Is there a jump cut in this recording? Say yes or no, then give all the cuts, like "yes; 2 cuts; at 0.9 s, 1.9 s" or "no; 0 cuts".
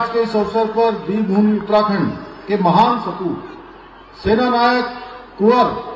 no; 0 cuts